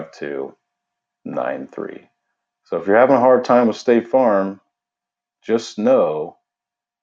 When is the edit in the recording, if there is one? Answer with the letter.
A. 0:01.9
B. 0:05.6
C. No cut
C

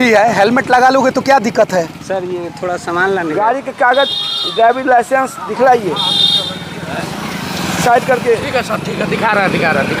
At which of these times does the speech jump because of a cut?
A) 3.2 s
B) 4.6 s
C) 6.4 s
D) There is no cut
A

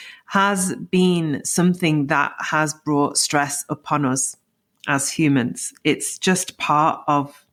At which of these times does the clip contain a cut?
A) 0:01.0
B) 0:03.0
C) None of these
C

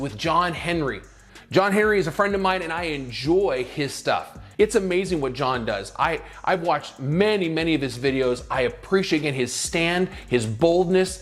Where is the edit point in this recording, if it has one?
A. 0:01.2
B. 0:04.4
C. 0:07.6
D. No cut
B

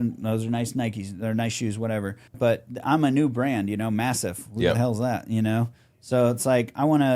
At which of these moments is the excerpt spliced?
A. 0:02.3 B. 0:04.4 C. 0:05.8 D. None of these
A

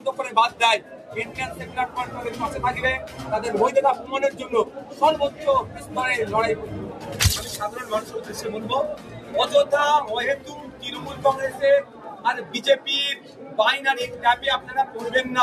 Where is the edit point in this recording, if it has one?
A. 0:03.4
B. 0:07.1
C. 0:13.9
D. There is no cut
B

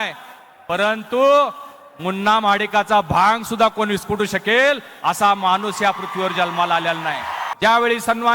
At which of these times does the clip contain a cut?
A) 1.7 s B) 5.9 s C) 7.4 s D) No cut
C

